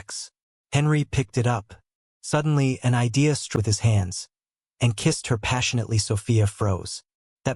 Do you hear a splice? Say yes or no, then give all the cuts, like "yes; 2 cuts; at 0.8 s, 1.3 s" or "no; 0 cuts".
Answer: yes; 1 cut; at 3.6 s